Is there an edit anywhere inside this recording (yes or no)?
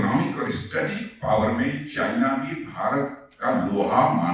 no